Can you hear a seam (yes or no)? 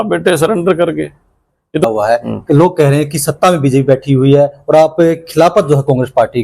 yes